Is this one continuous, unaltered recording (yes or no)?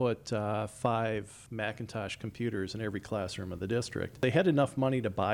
no